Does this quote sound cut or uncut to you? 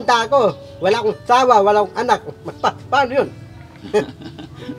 uncut